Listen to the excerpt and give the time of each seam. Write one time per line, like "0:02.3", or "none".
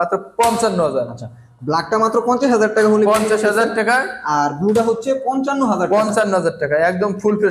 none